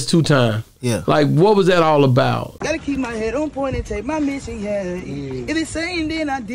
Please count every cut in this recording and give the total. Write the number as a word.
zero